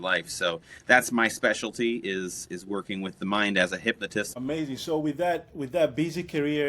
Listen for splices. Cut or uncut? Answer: cut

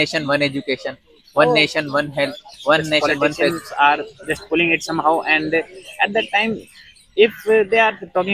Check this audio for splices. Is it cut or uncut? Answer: cut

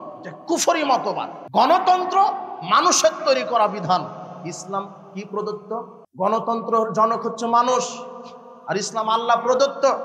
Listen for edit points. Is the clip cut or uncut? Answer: cut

